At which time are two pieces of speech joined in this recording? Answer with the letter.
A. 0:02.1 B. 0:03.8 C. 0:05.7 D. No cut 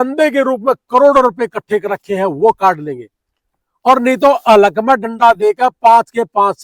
D